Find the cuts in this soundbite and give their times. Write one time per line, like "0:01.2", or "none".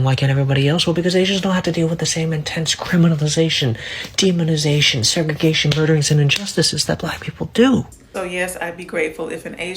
0:08.0